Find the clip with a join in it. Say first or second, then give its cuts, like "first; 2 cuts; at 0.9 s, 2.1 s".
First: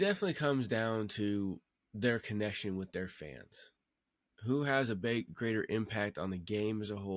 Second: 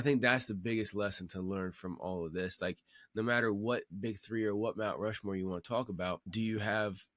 second; 1 cut; at 6.2 s